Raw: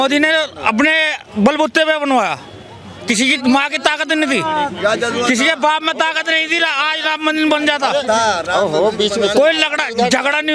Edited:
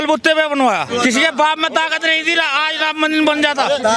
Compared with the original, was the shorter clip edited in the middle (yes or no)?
yes